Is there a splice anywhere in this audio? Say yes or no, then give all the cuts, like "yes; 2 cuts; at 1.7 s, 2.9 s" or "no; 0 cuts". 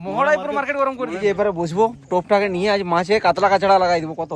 yes; 1 cut; at 1.2 s